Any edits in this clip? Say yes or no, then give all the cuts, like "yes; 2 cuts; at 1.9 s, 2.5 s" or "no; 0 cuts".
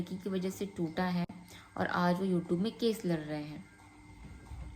no; 0 cuts